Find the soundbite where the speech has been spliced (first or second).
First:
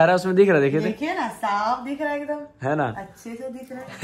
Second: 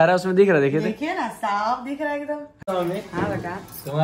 second